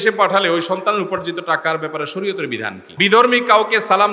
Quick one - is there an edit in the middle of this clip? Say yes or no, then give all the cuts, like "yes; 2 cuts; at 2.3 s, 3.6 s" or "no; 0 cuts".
yes; 1 cut; at 2.8 s